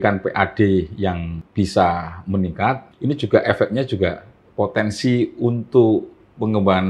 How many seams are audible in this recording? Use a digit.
2